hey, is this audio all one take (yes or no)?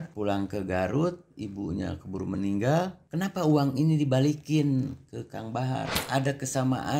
no